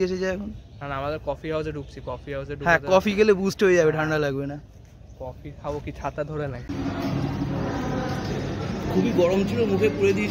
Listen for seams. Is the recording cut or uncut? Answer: cut